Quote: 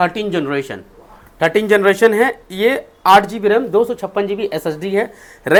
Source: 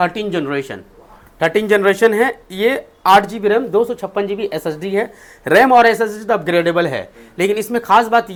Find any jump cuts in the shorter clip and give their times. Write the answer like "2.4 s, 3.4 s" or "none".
none